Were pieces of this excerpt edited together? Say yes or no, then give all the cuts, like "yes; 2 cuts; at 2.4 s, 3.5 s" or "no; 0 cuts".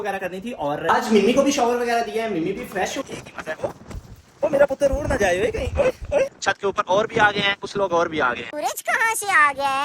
yes; 4 cuts; at 0.8 s, 3.0 s, 6.4 s, 8.5 s